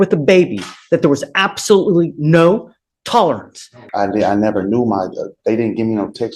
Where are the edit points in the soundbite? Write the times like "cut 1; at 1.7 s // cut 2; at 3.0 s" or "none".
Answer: cut 1; at 3.8 s